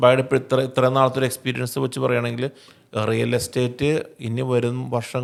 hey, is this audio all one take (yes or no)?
yes